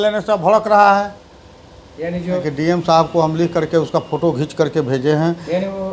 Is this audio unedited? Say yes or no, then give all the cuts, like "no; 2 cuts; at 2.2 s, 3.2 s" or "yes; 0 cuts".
no; 1 cut; at 2.4 s